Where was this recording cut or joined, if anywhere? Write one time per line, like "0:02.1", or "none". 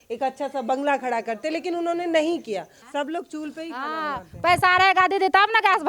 0:02.8